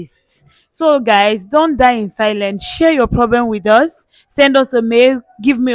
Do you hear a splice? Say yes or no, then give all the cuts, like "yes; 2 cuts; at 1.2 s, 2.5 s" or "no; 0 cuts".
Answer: no; 0 cuts